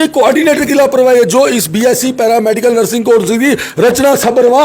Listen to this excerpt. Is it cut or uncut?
uncut